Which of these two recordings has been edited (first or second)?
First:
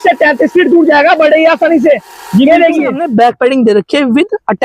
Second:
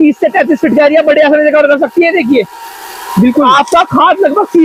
first